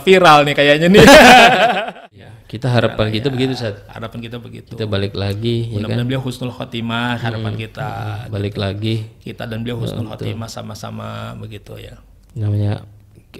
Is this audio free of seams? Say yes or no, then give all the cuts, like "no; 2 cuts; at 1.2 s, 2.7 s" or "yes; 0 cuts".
no; 1 cut; at 1.7 s